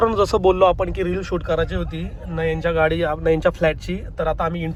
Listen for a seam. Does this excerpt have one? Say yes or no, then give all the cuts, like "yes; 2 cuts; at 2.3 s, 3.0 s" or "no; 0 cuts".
no; 0 cuts